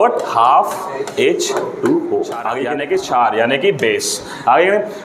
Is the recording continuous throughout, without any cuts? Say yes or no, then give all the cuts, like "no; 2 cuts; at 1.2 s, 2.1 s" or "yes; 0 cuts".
no; 1 cut; at 2.6 s